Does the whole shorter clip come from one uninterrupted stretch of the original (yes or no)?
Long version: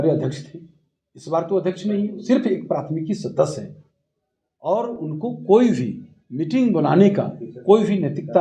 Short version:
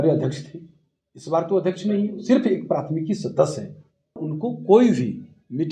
no